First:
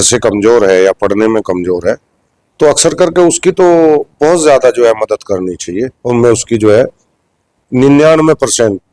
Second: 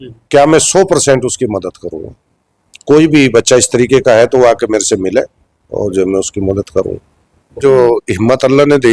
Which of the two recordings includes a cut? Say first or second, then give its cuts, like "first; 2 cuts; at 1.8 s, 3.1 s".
second; 1 cut; at 7.6 s